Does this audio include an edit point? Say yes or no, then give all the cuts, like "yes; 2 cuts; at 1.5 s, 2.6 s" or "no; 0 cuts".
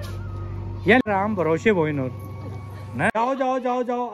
yes; 1 cut; at 3.0 s